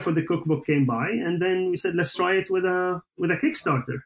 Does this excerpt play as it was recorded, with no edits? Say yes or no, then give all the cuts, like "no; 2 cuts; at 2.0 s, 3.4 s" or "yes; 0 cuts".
yes; 0 cuts